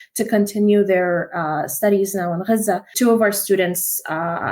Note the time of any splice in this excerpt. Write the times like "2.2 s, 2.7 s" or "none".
2.9 s